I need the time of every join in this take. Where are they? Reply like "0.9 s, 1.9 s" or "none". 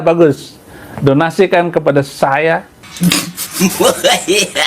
3.0 s